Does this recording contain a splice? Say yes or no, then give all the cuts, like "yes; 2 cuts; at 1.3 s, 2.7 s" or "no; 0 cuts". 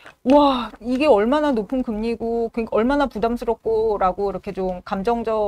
no; 0 cuts